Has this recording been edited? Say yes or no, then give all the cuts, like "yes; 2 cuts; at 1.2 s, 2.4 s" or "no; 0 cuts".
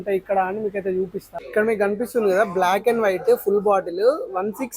yes; 1 cut; at 1.3 s